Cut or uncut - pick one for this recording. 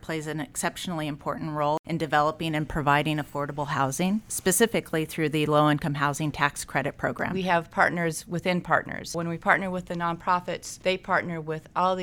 cut